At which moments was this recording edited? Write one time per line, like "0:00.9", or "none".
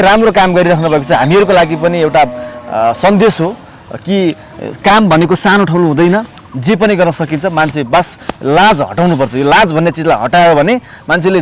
none